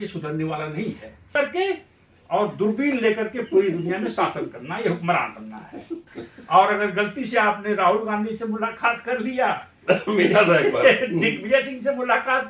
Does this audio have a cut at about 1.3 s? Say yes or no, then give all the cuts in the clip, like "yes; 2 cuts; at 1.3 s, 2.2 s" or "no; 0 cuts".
yes; 2 cuts; at 1.3 s, 6.1 s